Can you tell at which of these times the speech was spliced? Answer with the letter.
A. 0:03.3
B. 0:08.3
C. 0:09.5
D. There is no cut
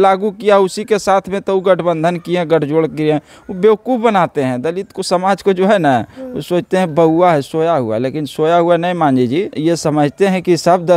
C